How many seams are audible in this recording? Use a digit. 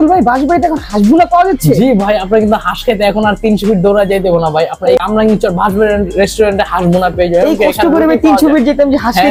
0